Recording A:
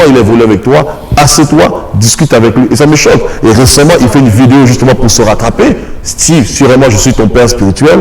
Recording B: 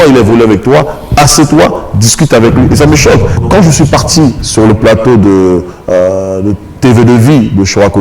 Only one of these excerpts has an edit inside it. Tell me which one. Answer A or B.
B